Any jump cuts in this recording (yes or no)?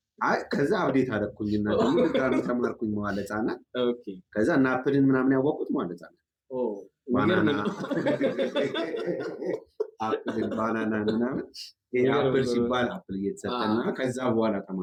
no